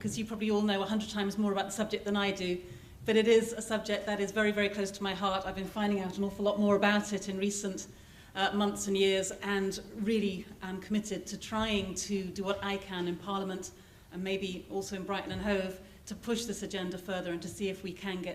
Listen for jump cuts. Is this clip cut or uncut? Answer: uncut